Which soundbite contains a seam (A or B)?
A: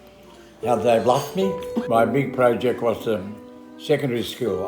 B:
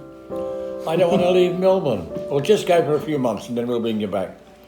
A